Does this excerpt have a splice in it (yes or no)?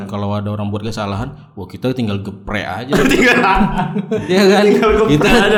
no